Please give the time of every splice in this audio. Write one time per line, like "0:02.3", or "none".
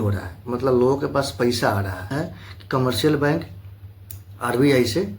0:02.1